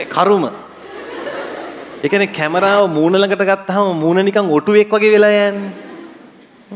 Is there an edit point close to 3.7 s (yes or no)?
no